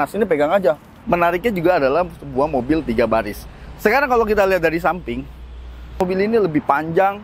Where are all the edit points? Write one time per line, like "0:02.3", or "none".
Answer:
0:00.9
0:06.0